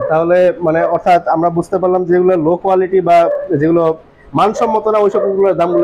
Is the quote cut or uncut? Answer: uncut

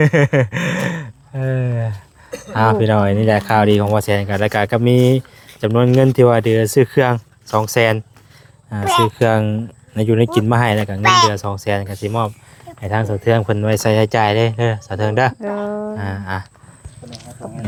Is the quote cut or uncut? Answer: uncut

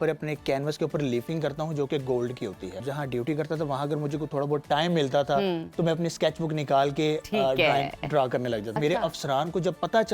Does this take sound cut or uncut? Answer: cut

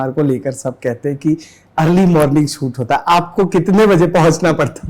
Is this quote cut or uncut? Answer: uncut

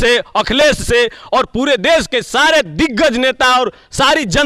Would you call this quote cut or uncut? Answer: uncut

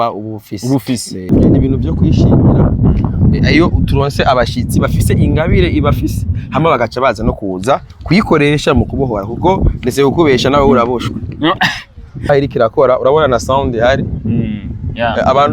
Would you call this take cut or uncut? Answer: cut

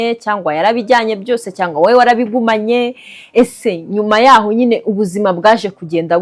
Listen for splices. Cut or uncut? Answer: uncut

